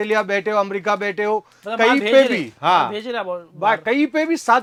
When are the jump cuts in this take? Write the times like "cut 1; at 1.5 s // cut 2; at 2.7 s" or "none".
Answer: none